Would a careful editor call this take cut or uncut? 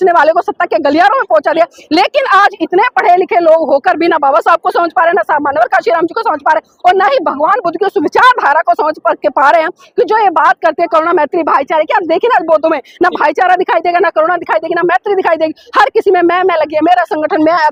uncut